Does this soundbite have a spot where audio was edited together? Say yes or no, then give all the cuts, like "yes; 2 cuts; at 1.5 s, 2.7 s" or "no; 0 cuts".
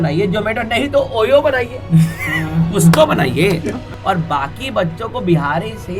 yes; 1 cut; at 3.9 s